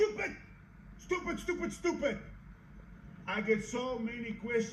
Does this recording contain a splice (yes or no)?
no